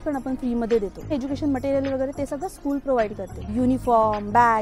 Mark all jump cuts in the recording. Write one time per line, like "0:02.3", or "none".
0:01.1
0:03.4